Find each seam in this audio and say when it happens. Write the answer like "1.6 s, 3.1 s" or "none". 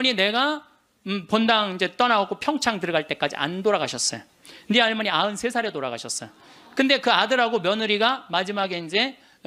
none